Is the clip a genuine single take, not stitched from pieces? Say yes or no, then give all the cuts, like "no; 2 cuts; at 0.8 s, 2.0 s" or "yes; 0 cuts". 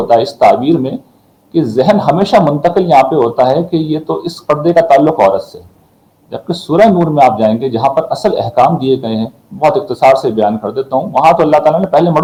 yes; 0 cuts